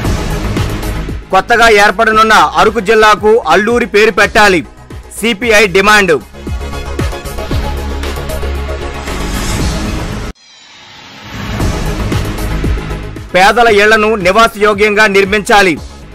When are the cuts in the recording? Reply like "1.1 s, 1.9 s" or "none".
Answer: 0.9 s